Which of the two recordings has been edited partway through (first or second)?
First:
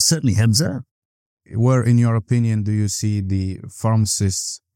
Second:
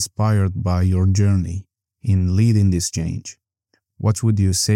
first